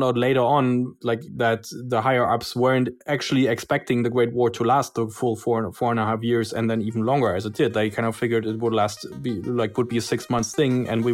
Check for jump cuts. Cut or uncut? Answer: cut